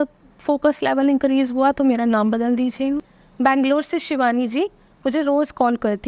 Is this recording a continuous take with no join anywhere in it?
no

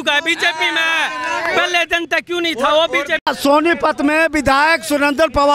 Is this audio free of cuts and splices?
no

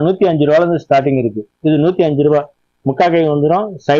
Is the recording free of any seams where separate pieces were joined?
yes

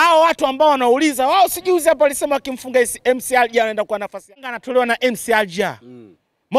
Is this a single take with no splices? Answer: no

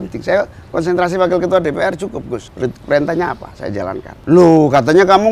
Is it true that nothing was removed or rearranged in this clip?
no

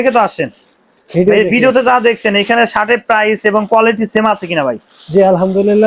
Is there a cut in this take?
no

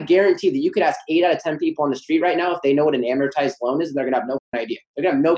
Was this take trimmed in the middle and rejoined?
yes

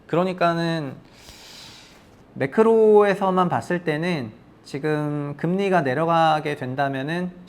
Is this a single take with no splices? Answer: no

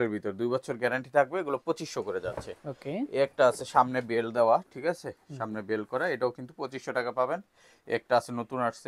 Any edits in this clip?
no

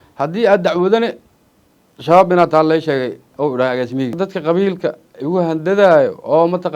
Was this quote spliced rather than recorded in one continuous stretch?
yes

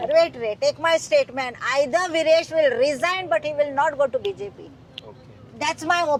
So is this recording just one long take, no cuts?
yes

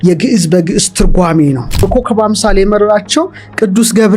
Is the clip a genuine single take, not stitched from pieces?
no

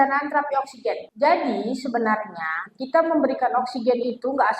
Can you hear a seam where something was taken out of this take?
yes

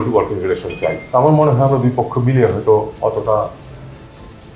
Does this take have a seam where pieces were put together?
yes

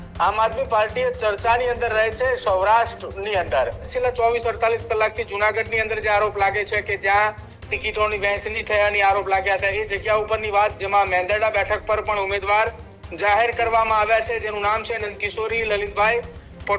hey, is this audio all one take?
no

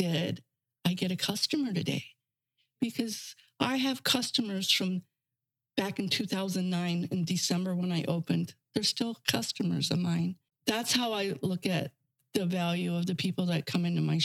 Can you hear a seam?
yes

